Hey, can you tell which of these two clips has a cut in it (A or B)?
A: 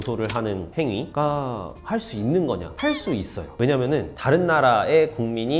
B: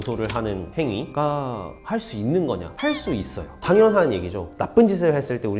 B